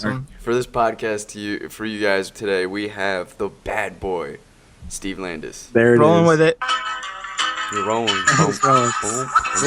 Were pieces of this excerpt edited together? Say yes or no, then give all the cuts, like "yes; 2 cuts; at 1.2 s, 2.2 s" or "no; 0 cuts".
yes; 1 cut; at 2.2 s